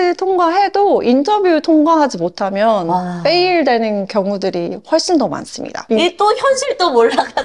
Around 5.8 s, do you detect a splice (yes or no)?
yes